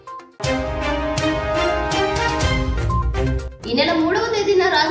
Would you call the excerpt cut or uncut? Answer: uncut